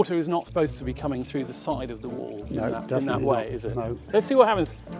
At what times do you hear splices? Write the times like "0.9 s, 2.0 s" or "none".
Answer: 4.0 s